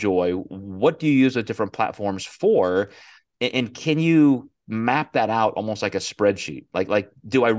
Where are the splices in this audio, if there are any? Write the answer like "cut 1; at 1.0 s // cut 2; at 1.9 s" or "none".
none